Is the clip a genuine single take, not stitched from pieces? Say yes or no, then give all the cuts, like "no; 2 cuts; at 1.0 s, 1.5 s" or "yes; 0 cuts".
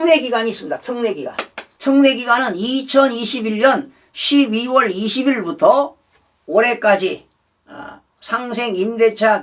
no; 1 cut; at 1.7 s